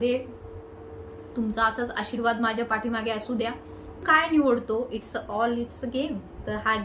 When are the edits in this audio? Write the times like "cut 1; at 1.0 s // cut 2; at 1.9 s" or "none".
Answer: cut 1; at 4.1 s